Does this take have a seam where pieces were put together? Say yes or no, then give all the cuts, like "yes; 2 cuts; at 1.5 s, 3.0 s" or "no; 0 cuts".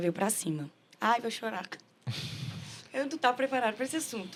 no; 0 cuts